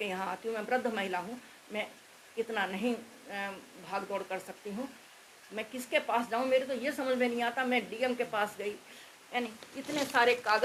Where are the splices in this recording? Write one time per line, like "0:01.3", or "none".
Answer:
none